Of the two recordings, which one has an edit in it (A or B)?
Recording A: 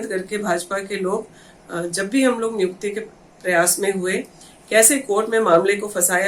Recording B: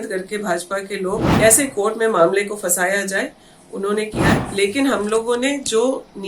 B